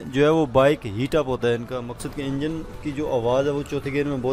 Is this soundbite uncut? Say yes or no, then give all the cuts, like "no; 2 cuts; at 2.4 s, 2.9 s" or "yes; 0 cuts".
yes; 0 cuts